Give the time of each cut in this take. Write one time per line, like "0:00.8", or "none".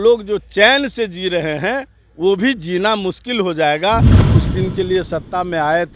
0:04.2